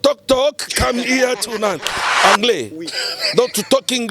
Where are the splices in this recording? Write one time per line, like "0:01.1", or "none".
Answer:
0:02.0